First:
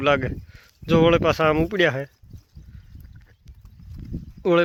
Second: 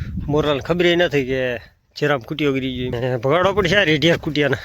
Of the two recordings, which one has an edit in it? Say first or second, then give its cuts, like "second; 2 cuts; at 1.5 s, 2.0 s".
second; 1 cut; at 2.9 s